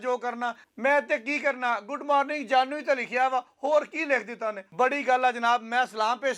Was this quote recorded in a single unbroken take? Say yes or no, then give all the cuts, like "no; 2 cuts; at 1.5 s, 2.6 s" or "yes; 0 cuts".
yes; 0 cuts